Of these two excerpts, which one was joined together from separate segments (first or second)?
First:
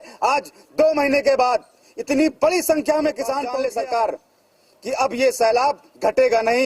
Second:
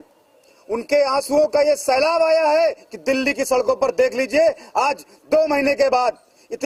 first